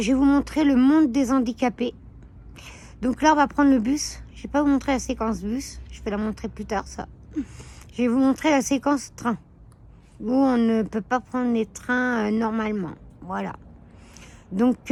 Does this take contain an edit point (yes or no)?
no